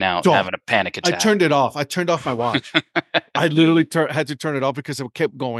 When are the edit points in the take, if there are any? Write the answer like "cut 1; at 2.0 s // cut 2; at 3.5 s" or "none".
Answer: none